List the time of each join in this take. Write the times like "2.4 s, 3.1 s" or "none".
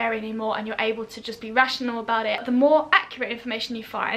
2.4 s